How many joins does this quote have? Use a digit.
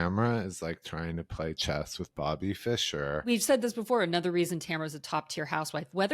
1